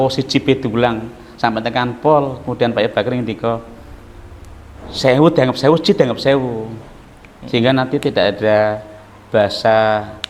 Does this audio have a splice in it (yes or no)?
no